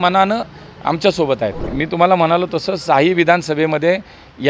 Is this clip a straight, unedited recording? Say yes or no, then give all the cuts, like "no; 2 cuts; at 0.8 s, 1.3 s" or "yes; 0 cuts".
no; 1 cut; at 1.7 s